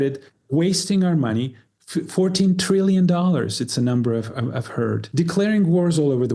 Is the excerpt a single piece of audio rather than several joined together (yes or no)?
no